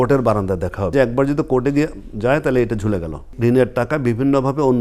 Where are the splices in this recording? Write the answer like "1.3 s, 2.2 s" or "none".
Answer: 0.9 s, 3.3 s